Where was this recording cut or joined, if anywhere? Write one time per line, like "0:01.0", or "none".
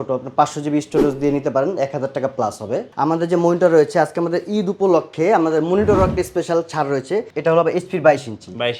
0:02.9
0:07.3